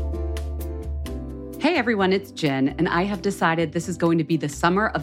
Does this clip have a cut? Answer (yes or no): yes